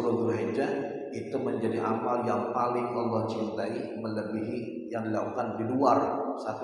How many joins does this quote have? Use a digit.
0